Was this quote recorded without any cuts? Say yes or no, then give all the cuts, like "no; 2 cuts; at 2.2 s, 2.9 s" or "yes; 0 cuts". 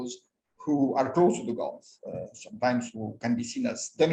yes; 0 cuts